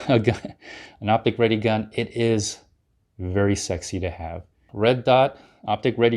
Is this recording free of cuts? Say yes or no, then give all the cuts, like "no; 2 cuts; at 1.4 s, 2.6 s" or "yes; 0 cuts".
no; 1 cut; at 4.7 s